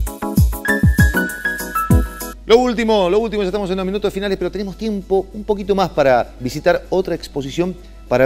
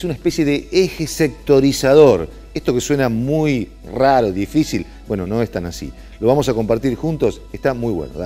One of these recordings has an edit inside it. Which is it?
first; 1 cut; at 2.2 s

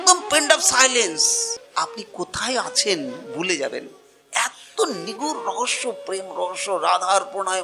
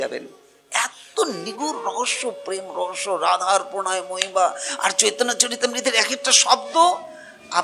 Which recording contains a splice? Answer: first; 1 cut; at 1.6 s

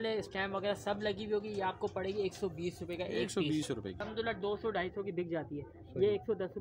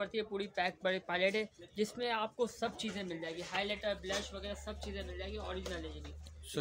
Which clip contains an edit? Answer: first; 1 cut; at 4.0 s

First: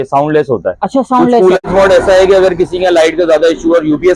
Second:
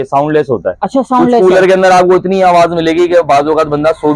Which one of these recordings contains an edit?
first; 1 cut; at 1.6 s

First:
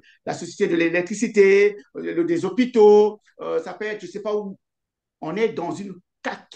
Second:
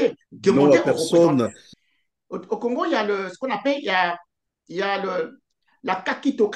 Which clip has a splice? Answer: second; 1 cut; at 1.6 s

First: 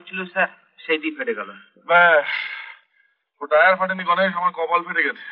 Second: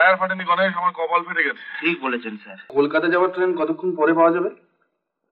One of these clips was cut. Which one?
second; 1 cut; at 2.7 s

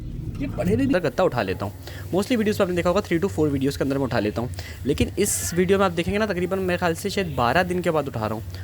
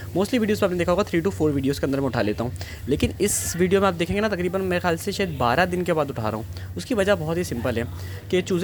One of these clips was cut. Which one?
first; 1 cut; at 0.9 s

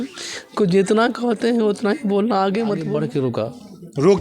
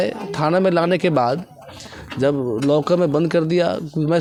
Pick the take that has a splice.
first; 1 cut; at 3.0 s

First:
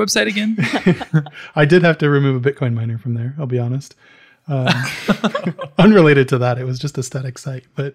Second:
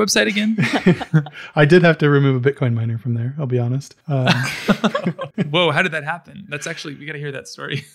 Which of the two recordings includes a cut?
second; 2 cuts; at 3.9 s, 5.3 s

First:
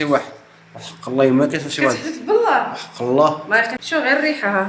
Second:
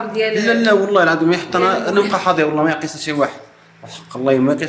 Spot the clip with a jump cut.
first; 1 cut; at 3.8 s

